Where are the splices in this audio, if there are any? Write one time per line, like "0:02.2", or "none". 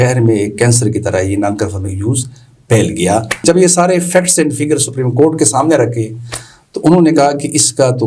0:03.4

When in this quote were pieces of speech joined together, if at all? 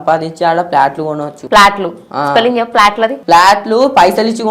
0:01.3
0:03.2

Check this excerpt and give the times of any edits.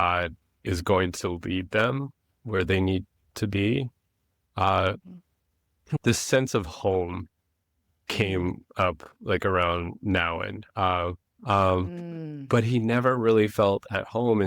0:11.3

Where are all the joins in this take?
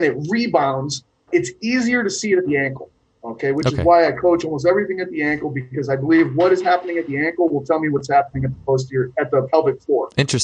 0:01.3

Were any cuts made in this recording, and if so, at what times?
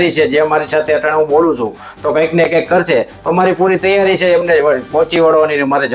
none

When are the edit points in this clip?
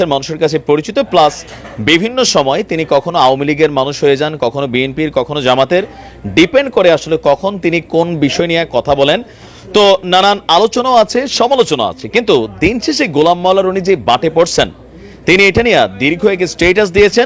none

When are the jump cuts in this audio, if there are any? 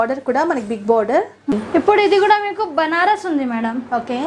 0:01.5

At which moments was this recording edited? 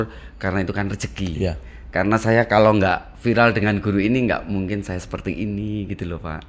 none

